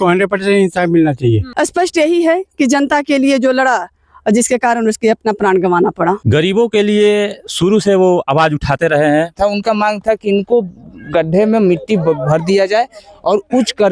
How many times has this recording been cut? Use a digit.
3